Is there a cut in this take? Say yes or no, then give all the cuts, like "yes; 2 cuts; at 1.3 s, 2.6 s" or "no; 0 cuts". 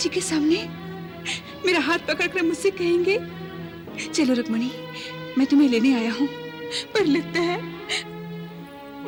no; 0 cuts